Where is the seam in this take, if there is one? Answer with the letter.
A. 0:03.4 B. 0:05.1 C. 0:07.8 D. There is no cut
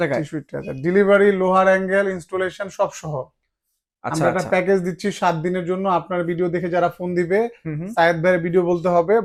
D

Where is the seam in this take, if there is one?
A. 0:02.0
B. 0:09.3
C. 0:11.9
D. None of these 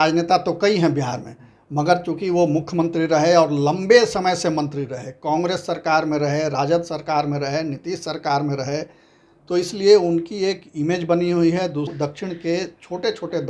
C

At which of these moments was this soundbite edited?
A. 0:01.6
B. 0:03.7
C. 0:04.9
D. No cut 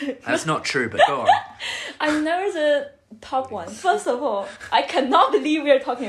B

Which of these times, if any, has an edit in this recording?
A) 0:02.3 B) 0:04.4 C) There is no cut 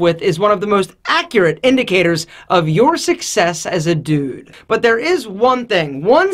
B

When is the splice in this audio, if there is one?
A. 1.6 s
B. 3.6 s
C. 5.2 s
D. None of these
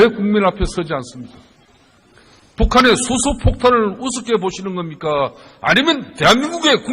D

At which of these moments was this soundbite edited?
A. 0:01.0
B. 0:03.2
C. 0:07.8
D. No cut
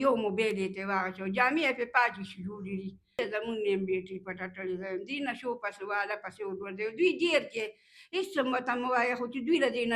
B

